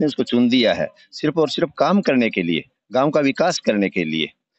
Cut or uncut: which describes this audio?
uncut